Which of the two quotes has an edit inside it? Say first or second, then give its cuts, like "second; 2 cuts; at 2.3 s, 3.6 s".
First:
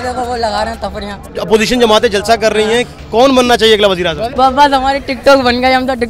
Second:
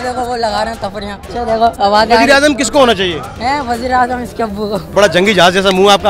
first; 1 cut; at 1.2 s